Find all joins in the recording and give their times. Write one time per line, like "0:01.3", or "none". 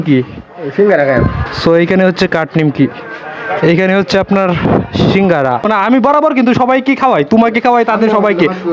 0:05.7

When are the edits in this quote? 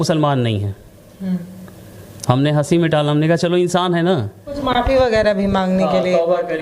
0:04.5

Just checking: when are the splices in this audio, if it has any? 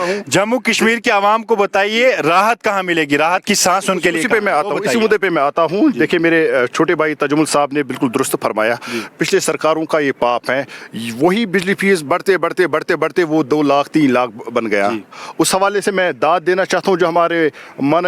none

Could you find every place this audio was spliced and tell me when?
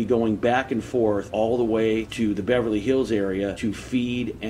0:01.3
0:02.1
0:03.6

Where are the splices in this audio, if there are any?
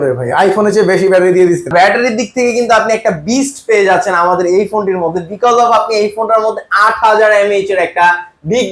0:01.7

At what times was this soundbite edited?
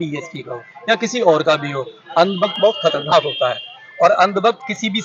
none

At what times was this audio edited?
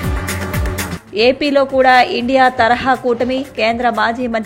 0:00.9

